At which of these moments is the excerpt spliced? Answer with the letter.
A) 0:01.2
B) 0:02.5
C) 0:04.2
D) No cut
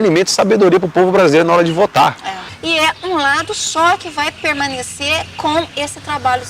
B